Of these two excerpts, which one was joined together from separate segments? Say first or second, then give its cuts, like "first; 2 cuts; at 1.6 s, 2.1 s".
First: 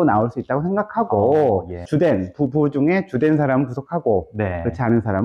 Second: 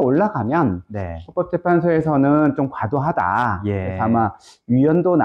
first; 1 cut; at 1.9 s